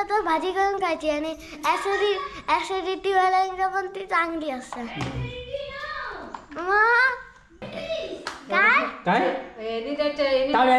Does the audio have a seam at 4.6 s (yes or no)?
no